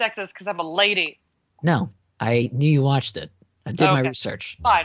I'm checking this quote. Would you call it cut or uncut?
uncut